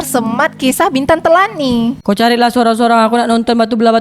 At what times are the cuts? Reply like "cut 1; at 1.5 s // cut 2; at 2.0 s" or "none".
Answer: cut 1; at 2.0 s

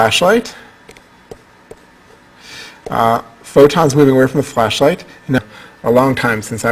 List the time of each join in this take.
none

